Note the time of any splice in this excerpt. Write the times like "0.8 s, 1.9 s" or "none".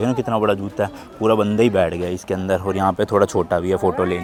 none